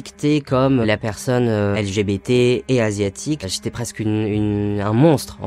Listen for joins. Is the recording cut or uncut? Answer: cut